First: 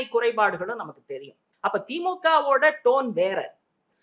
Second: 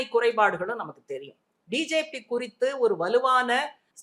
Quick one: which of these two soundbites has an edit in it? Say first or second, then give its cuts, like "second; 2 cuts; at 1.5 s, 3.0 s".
first; 1 cut; at 1.4 s